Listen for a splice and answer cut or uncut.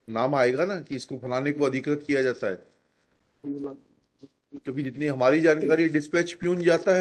uncut